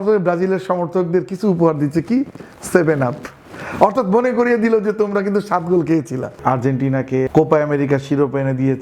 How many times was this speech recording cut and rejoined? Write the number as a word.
two